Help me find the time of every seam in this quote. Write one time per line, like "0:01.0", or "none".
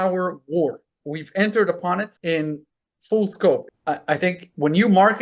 0:03.6

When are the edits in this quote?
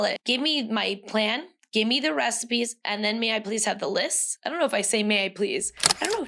0:04.4

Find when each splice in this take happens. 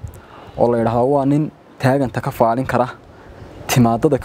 none

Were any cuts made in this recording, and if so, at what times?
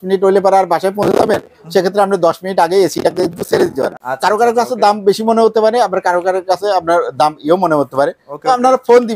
0:03.9

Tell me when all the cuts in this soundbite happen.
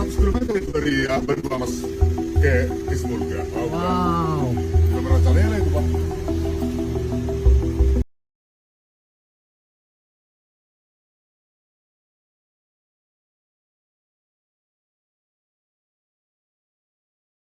none

